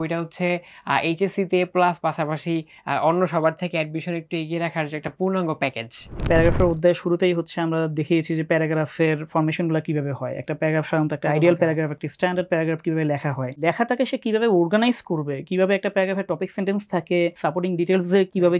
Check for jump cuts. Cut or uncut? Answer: cut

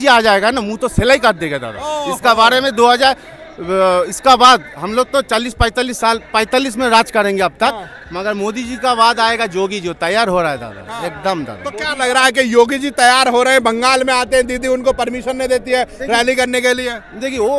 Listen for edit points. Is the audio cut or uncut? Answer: uncut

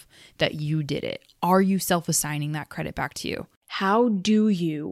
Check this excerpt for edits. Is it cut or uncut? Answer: cut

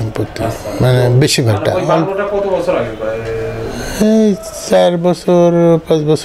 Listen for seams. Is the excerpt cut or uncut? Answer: uncut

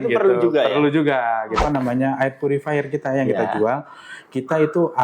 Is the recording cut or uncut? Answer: cut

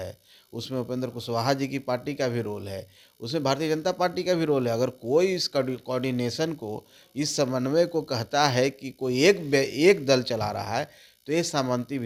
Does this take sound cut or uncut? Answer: uncut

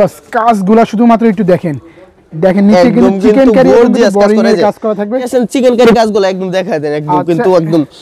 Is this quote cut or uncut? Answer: cut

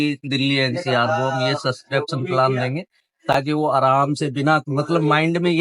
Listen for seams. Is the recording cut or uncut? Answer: uncut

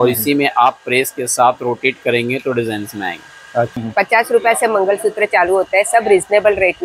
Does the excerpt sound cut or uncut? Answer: cut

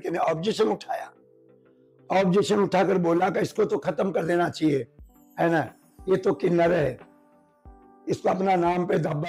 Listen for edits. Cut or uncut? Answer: uncut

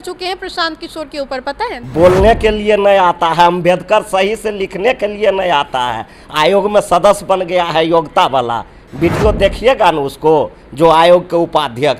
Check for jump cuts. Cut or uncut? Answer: cut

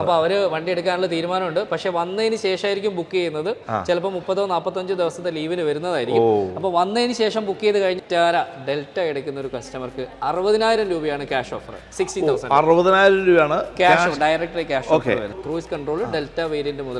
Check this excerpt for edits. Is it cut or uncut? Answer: cut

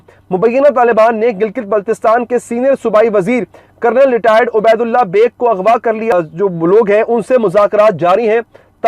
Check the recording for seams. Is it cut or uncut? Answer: cut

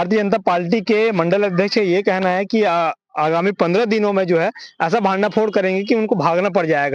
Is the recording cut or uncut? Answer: uncut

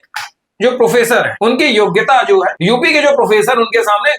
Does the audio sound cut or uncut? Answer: cut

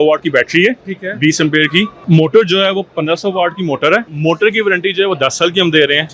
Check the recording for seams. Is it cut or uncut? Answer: cut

